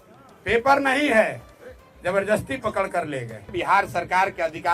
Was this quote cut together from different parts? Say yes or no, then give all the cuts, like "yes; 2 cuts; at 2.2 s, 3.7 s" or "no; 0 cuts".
yes; 1 cut; at 3.5 s